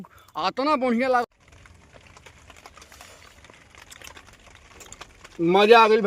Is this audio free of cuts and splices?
no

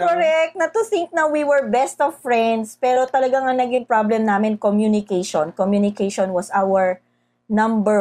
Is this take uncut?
yes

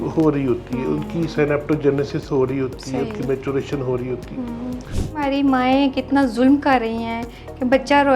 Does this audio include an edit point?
yes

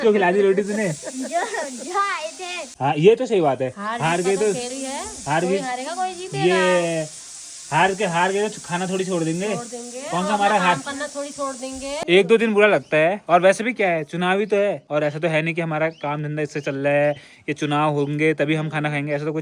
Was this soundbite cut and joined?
yes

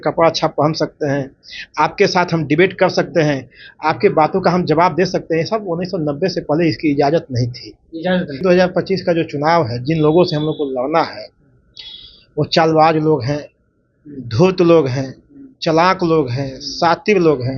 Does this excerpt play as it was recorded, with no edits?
no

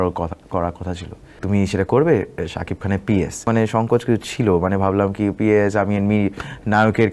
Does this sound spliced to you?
yes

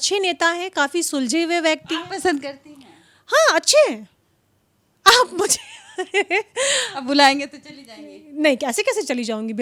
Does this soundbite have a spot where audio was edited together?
no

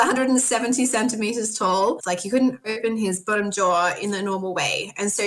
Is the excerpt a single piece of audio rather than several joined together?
no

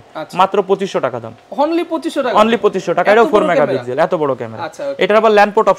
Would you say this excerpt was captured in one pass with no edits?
yes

